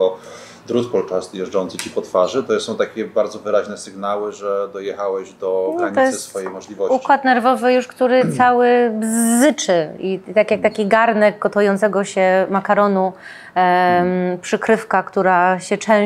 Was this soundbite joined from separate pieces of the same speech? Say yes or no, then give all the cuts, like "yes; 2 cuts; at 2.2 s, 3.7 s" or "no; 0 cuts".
no; 0 cuts